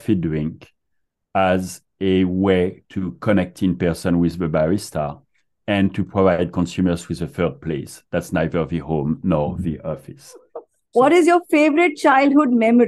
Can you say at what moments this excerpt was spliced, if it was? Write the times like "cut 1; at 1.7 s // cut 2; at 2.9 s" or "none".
cut 1; at 10.6 s